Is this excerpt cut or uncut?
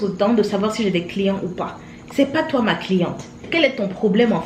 uncut